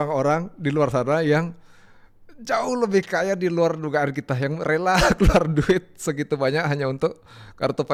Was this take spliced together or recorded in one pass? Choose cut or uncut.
uncut